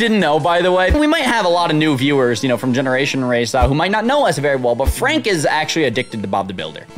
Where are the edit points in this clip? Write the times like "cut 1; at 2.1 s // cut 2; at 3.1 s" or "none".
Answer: cut 1; at 0.9 s